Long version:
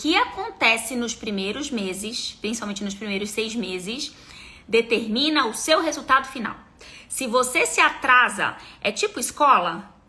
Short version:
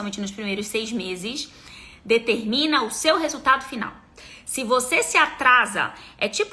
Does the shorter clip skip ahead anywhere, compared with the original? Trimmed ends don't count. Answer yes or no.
no